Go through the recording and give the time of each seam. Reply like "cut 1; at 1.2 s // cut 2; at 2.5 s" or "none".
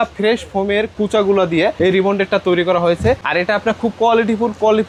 none